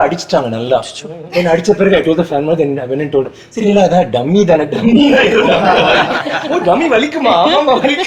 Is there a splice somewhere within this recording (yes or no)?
no